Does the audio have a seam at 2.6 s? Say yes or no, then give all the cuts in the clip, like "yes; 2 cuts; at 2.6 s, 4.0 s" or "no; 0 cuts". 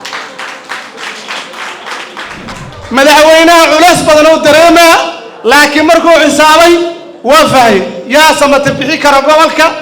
yes; 1 cut; at 2.6 s